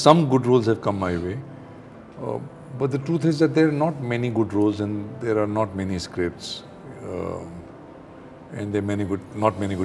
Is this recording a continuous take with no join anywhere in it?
yes; 0 cuts

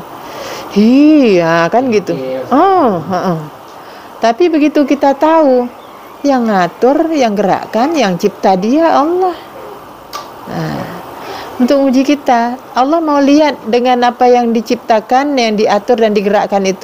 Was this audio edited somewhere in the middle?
no; 0 cuts

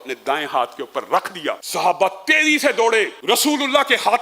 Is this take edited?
yes; 2 cuts; at 1.6 s, 3.2 s

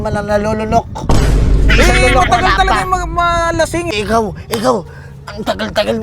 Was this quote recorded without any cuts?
no; 1 cut; at 3.9 s

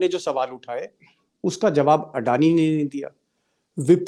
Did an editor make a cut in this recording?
no; 0 cuts

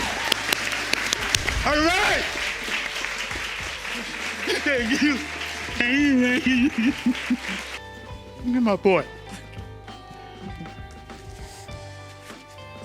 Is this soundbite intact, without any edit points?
yes; 0 cuts

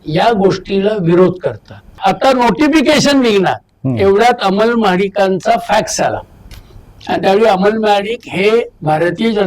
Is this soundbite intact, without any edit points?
no; 1 cut; at 1.9 s

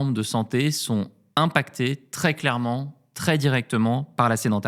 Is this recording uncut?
yes; 0 cuts

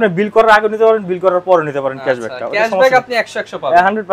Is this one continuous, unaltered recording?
yes; 0 cuts

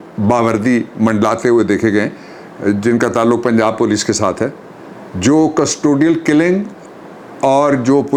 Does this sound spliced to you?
no; 0 cuts

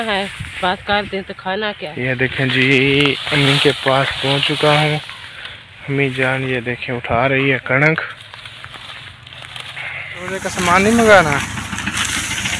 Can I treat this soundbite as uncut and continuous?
no; 2 cuts; at 1.9 s, 10.5 s

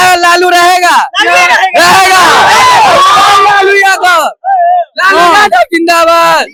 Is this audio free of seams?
yes; 0 cuts

